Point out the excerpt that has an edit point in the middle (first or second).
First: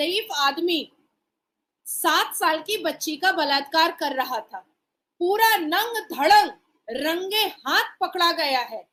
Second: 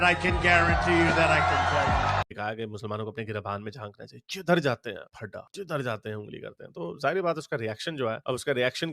second